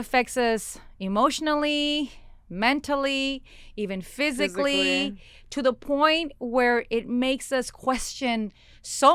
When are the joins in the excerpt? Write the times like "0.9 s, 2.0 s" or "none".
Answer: none